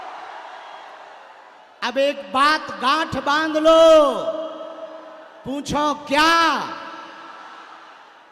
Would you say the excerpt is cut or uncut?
uncut